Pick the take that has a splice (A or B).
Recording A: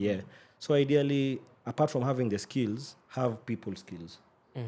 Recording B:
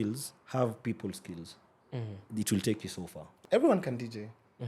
B